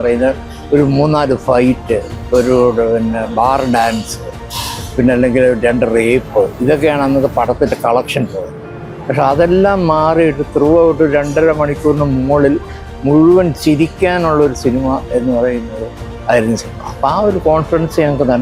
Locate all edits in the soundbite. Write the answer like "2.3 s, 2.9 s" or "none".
none